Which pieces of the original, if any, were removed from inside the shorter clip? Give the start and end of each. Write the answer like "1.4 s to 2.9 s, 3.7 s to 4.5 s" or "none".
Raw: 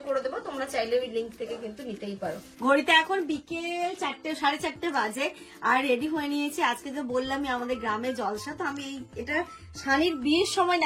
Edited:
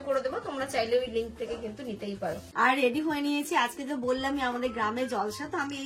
2.4 s to 5.5 s